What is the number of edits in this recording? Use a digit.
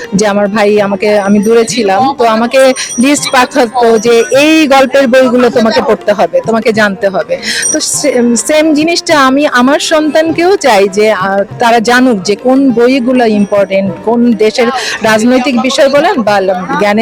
0